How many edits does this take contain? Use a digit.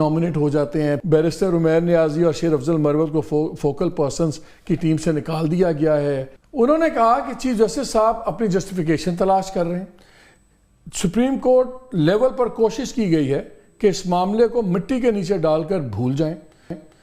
2